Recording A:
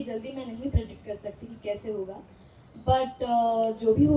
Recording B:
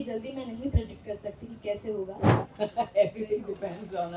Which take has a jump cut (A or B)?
B